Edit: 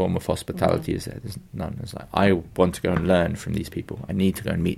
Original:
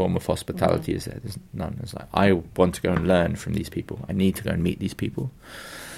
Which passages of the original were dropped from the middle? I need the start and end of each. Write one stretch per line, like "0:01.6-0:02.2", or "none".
none